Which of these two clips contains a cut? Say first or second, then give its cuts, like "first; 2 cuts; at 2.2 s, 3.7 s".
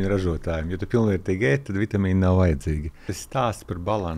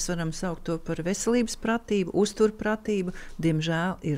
first; 1 cut; at 3.2 s